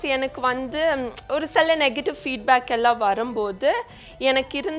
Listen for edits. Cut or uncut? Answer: uncut